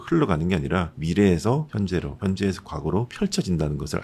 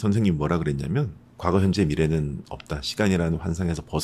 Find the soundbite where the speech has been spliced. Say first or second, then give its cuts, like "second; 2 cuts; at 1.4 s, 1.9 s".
first; 3 cuts; at 1.0 s, 1.9 s, 3.1 s